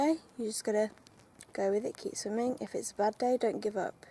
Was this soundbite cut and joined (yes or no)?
no